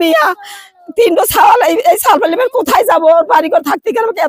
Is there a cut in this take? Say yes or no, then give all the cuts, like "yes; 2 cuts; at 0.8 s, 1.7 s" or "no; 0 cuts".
no; 0 cuts